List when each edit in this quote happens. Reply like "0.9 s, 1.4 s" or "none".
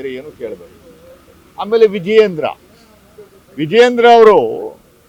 none